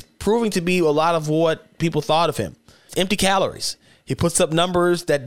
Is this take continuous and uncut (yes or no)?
no